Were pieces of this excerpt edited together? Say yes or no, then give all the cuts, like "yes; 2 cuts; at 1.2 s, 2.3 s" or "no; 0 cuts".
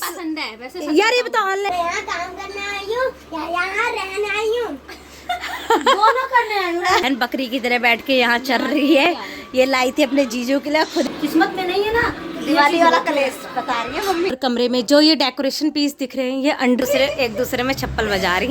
yes; 5 cuts; at 1.7 s, 7.0 s, 11.1 s, 14.3 s, 16.8 s